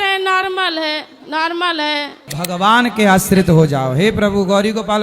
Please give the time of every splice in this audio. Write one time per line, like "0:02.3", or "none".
0:02.3